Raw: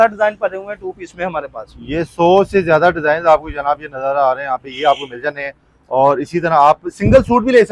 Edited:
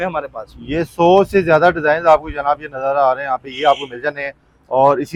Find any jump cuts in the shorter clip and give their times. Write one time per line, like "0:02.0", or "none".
none